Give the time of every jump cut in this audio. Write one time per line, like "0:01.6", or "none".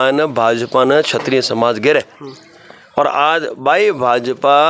none